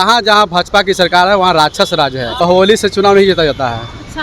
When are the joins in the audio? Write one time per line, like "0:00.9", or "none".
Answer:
0:02.4